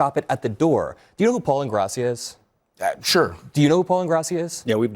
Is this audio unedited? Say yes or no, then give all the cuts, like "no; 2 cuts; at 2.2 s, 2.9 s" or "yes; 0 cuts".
no; 1 cut; at 1.0 s